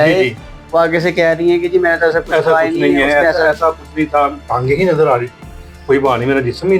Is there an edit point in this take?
no; 0 cuts

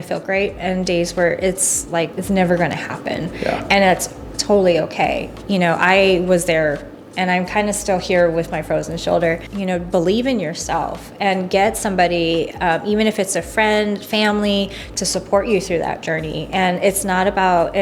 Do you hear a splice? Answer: yes; 2 cuts; at 2.2 s, 9.5 s

